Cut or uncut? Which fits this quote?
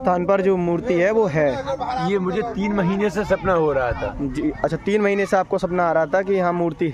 uncut